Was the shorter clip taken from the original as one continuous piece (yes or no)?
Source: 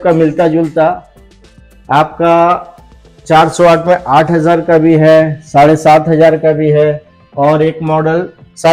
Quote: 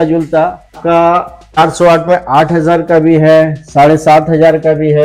no